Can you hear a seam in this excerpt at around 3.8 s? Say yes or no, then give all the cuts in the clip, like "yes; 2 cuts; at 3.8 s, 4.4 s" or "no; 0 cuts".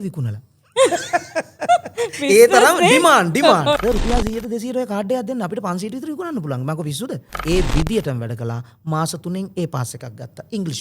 yes; 2 cuts; at 3.8 s, 7.4 s